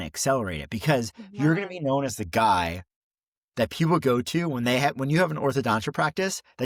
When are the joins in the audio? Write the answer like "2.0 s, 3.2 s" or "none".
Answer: none